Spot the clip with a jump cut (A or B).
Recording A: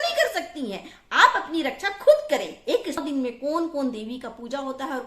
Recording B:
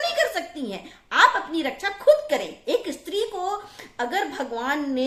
A